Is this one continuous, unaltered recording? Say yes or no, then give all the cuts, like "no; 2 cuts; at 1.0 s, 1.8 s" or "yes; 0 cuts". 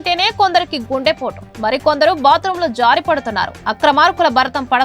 yes; 0 cuts